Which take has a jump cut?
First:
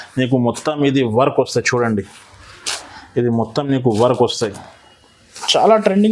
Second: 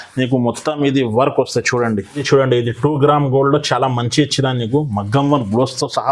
second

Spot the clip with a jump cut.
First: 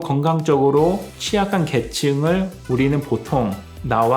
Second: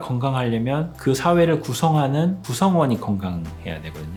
first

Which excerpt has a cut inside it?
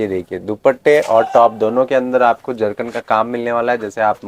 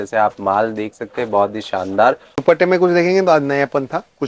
second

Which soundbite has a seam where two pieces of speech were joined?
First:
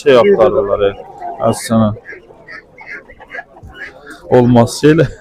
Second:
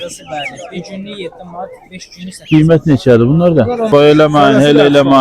second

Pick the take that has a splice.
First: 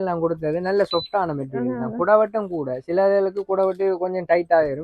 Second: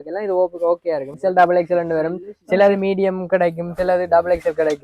second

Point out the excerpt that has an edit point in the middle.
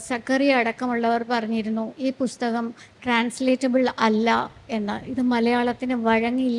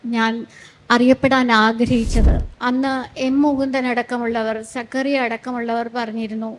second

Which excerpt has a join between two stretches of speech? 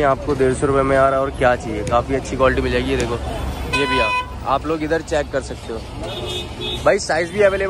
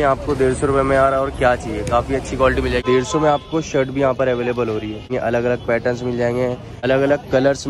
second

